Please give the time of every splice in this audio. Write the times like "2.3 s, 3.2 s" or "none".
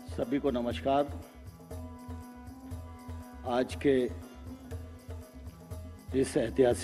1.2 s, 3.1 s